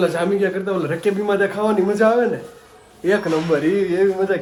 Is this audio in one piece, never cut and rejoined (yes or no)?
yes